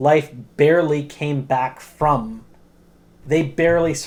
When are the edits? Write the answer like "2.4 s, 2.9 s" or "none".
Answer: none